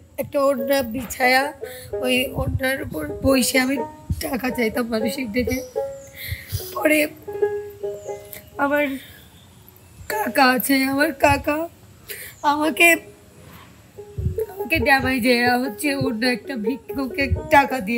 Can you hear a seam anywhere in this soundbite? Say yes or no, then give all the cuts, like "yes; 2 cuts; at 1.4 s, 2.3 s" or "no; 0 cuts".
no; 0 cuts